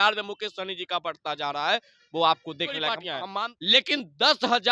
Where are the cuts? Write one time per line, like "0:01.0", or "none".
0:03.1